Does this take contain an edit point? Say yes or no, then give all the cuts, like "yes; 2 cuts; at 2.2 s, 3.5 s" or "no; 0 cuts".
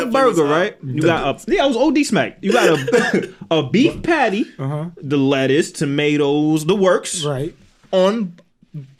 no; 0 cuts